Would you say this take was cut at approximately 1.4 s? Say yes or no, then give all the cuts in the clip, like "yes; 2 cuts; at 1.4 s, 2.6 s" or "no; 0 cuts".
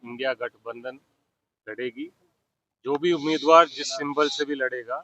no; 0 cuts